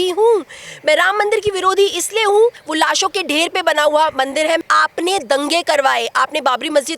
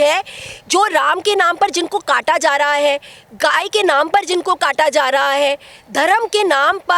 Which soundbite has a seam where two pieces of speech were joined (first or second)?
first